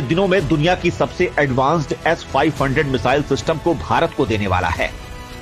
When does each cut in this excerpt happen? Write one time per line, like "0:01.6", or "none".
none